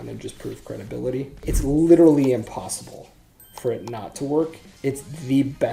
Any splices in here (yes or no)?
yes